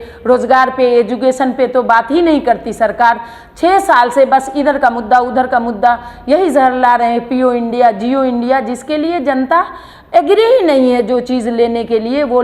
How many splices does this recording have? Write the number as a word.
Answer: zero